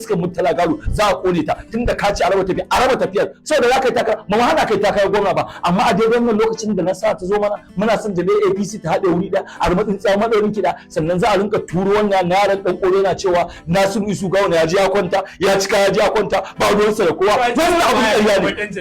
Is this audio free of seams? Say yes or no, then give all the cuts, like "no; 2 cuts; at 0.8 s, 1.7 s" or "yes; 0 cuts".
no; 1 cut; at 3.4 s